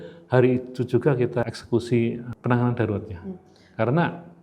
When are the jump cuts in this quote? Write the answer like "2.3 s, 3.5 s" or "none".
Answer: 1.4 s, 2.3 s

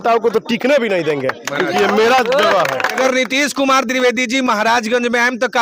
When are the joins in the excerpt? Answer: 3.0 s

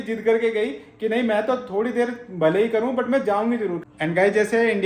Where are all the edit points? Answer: 3.8 s

